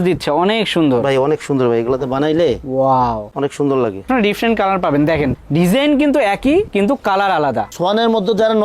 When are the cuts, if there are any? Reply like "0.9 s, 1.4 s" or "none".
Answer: 4.1 s, 7.7 s